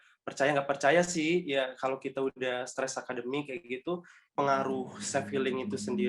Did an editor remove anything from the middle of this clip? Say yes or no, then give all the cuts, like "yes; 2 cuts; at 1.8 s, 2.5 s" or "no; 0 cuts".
yes; 1 cut; at 4.2 s